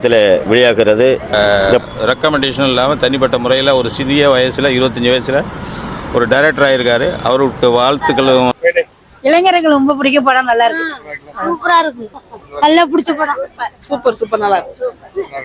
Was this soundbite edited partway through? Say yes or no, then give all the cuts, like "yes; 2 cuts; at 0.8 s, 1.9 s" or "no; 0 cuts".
yes; 2 cuts; at 1.3 s, 8.5 s